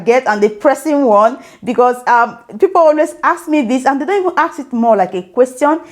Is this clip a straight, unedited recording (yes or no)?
yes